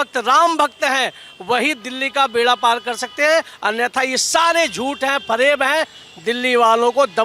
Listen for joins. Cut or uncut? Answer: cut